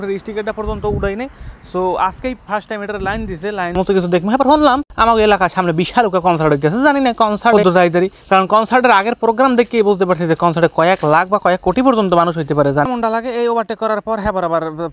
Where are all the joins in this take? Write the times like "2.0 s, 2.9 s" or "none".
3.8 s, 12.9 s